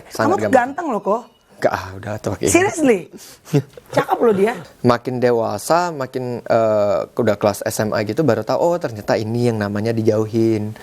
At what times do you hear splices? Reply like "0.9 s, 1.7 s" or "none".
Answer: 4.6 s

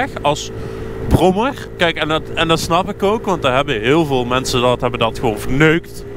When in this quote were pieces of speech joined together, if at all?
none

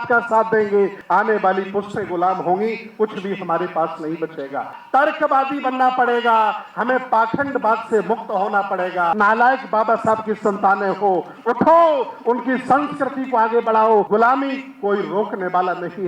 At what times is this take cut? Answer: 1.0 s, 4.8 s, 9.1 s, 14.1 s

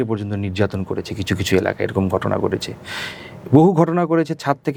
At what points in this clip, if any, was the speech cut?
none

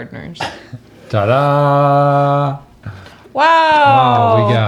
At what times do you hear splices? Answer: none

